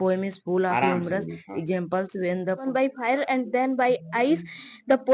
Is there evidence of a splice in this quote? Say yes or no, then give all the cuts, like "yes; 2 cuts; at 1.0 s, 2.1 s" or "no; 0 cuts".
yes; 1 cut; at 2.6 s